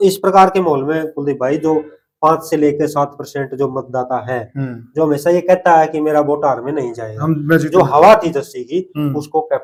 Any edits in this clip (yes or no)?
no